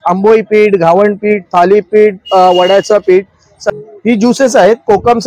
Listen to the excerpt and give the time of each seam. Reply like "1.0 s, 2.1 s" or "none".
3.5 s

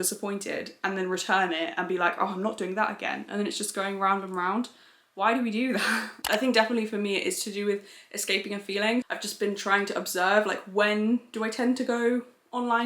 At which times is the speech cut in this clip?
none

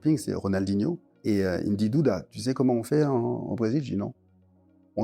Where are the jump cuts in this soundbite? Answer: 1.1 s

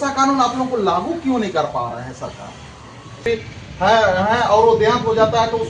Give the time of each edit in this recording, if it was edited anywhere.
3.2 s

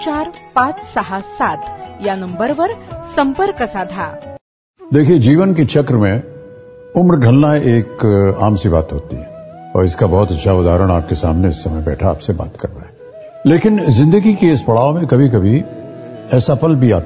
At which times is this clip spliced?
4.4 s

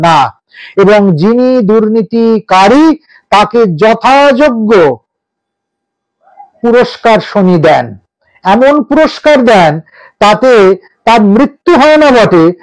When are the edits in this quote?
none

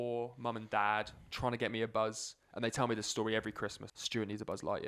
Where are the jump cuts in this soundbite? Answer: 3.9 s

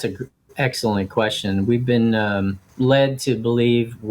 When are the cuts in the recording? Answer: 2.6 s

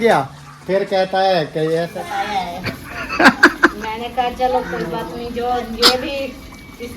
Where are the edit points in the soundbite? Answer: 1.9 s

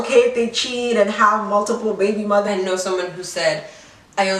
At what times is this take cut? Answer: 2.5 s

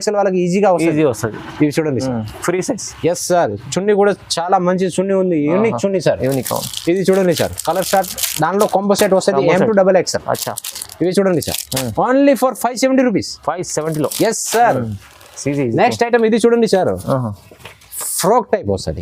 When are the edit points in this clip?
none

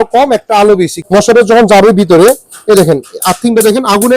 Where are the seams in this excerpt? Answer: 1.0 s

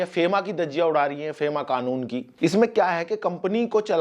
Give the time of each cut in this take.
2.2 s

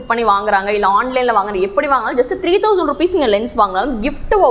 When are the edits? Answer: none

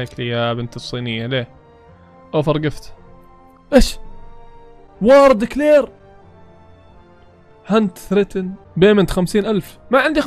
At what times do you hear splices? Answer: none

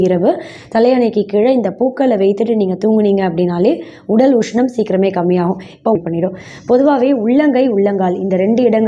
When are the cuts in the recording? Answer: 6.0 s

